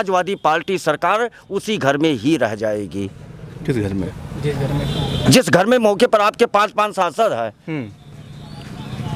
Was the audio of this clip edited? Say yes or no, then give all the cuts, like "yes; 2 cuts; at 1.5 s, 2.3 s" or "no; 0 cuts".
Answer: no; 0 cuts